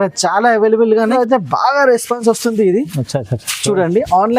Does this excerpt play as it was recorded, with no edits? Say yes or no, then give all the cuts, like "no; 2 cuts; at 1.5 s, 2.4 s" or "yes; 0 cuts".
no; 1 cut; at 1.1 s